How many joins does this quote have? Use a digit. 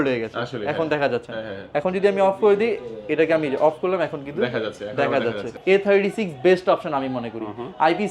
1